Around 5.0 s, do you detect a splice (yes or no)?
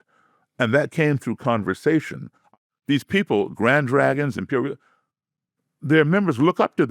no